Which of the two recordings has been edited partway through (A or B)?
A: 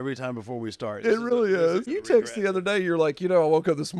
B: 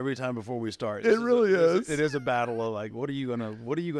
A